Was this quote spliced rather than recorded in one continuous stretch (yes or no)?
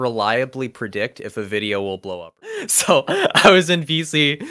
yes